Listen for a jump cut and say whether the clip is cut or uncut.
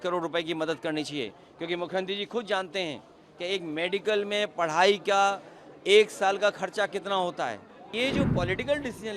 cut